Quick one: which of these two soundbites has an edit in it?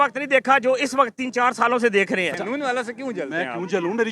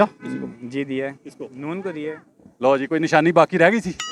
first; 1 cut; at 2.3 s

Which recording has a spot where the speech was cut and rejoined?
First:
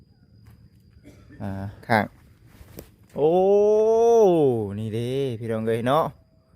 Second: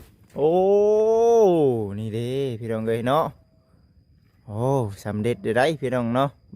first; 1 cut; at 1.8 s

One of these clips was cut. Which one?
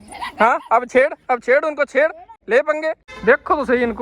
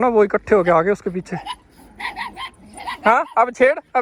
first; 2 cuts; at 2.3 s, 3.1 s

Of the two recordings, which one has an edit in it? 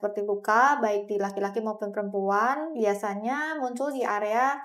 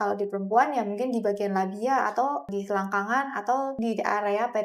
second; 2 cuts; at 2.5 s, 3.7 s

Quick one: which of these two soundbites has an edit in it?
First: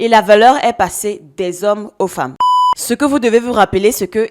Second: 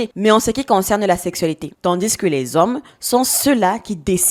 first; 1 cut; at 2.4 s

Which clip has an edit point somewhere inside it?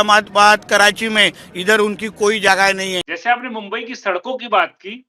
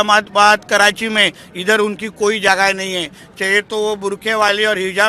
first; 1 cut; at 3.1 s

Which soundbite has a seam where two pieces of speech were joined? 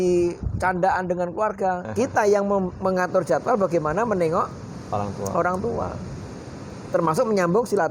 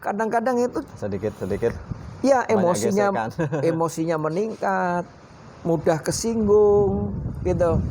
first; 1 cut; at 1.9 s

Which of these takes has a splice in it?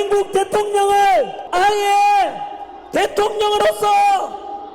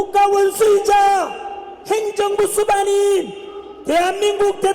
first; 1 cut; at 1.4 s

